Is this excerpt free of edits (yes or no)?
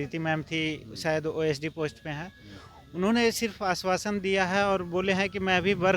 yes